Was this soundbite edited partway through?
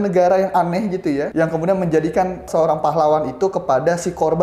yes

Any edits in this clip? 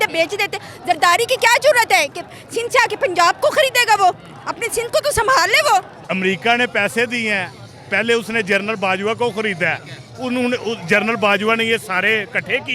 yes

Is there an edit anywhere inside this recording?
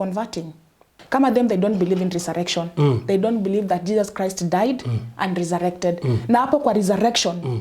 yes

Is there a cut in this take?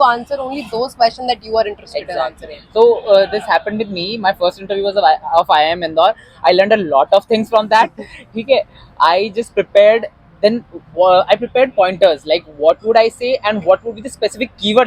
no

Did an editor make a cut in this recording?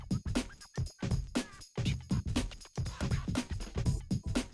no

